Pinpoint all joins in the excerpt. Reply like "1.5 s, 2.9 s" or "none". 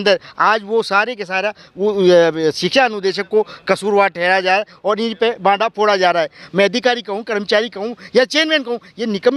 6.4 s